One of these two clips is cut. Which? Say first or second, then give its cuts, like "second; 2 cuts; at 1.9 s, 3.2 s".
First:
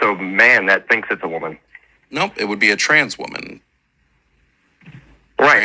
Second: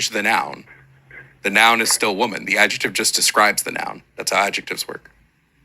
second; 1 cut; at 3.1 s